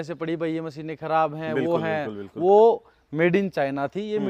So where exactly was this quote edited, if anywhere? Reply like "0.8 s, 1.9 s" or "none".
none